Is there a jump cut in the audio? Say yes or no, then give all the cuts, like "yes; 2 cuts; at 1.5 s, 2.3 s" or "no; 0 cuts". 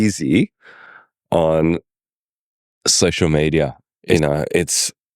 yes; 1 cut; at 4.1 s